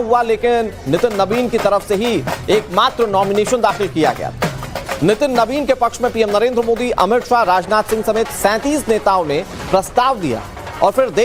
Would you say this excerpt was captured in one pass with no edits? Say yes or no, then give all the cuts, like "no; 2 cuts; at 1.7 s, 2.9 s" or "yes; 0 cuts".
yes; 0 cuts